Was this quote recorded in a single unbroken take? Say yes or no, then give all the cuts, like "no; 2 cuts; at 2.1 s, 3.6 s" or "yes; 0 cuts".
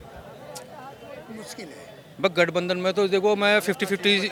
yes; 0 cuts